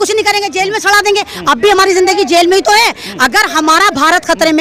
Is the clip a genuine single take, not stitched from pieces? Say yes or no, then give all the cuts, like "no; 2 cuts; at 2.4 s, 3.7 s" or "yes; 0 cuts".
yes; 0 cuts